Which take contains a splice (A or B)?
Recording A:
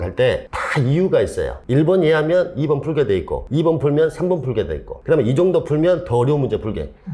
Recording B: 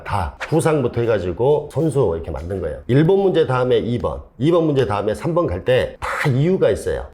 B